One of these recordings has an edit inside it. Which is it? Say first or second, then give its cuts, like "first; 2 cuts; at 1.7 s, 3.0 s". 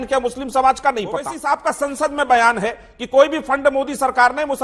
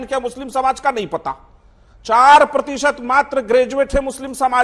first; 1 cut; at 1.3 s